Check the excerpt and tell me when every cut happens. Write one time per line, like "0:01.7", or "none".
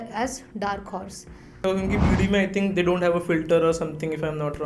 0:01.6